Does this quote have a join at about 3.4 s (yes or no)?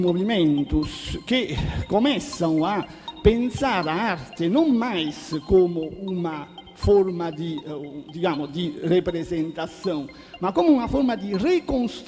no